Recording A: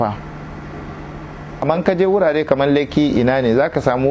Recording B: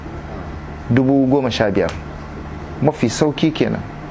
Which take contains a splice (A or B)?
A